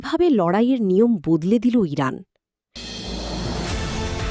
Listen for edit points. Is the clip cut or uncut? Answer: cut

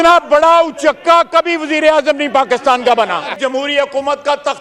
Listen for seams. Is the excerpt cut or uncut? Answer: cut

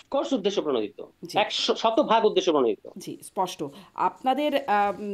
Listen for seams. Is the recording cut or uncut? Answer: uncut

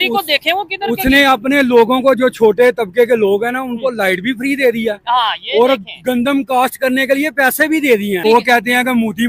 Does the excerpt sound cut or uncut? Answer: cut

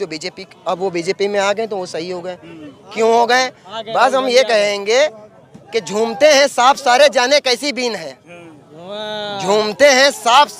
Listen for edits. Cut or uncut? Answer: uncut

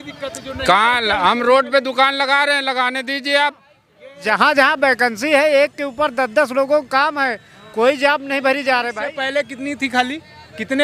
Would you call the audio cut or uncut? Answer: cut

